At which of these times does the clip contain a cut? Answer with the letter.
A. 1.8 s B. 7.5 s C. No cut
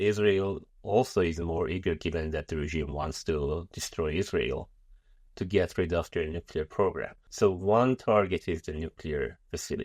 B